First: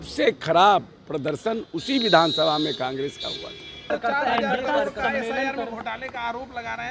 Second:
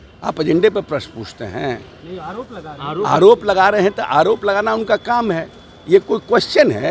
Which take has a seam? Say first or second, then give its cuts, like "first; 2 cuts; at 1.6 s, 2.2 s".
first; 1 cut; at 3.9 s